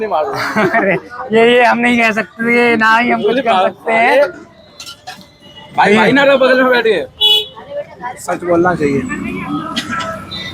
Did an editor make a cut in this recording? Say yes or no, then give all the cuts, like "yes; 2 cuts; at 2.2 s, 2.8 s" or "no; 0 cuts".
no; 0 cuts